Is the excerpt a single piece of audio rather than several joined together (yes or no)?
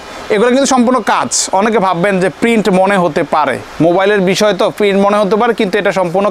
yes